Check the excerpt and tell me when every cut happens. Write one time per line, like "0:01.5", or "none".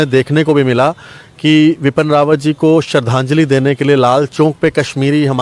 none